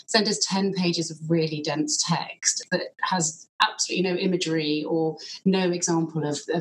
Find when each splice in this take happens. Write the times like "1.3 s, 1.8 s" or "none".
2.6 s